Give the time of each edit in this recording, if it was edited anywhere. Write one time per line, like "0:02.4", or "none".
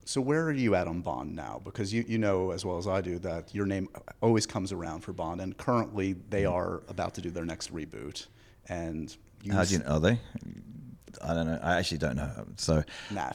none